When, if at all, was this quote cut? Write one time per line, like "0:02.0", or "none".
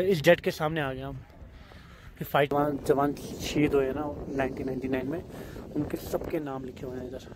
0:02.5